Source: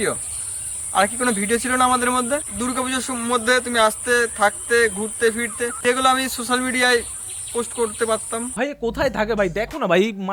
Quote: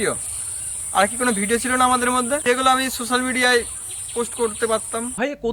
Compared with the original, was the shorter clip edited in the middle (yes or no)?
yes